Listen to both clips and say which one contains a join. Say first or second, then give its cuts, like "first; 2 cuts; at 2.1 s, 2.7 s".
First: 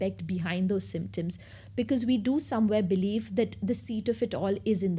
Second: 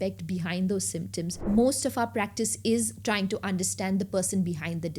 second; 1 cut; at 1.4 s